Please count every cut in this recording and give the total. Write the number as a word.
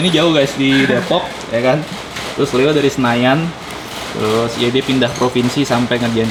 zero